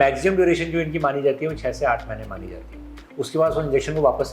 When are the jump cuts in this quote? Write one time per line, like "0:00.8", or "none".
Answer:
none